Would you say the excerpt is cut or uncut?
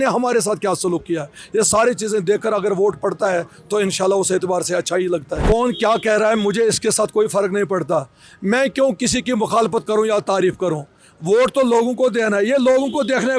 cut